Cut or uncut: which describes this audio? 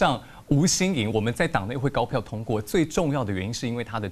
uncut